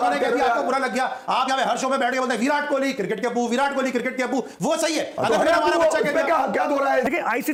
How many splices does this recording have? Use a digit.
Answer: 0